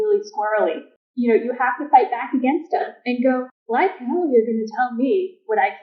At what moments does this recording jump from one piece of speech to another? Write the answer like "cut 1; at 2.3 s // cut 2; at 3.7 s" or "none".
cut 1; at 0.8 s // cut 2; at 3.6 s